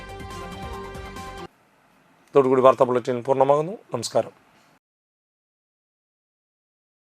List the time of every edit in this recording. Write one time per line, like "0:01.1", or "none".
none

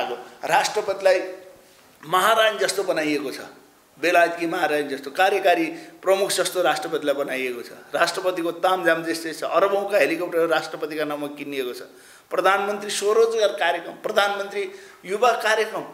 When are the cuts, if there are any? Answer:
none

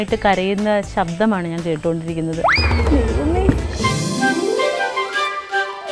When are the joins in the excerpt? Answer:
0:03.8

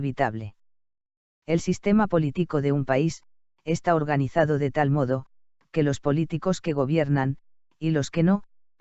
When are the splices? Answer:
0:07.0

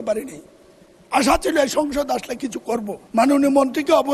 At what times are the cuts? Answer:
0:03.0

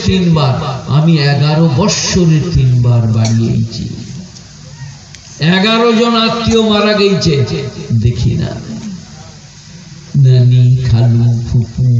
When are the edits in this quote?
none

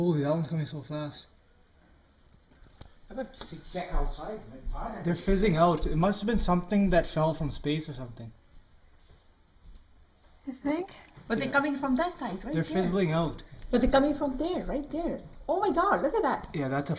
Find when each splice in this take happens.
0:14.8

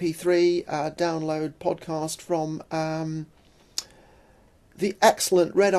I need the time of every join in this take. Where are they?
0:04.4

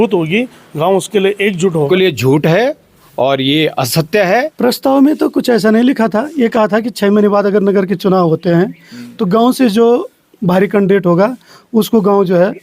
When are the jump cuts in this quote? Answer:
0:01.8
0:04.5

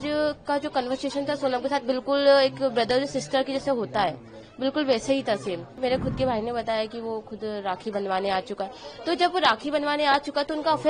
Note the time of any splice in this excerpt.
0:05.7

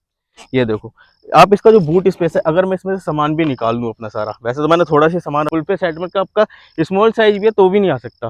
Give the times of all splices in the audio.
0:05.5

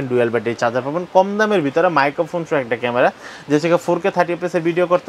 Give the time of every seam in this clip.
none

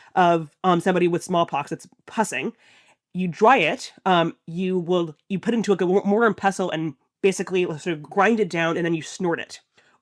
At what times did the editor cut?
none

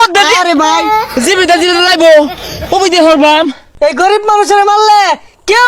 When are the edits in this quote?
0:03.6

